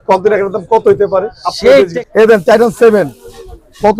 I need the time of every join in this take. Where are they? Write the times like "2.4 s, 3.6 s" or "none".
2.0 s